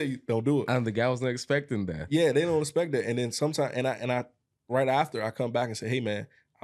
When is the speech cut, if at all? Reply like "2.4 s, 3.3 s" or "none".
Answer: none